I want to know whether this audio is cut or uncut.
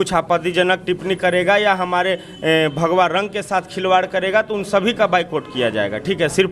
uncut